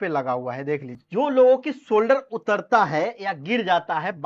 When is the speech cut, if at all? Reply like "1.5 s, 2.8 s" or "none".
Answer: 1.0 s